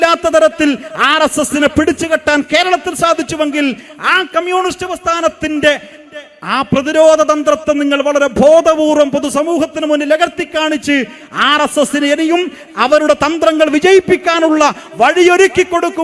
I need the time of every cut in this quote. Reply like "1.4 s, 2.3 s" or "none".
none